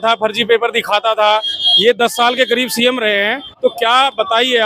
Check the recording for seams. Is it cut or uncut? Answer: uncut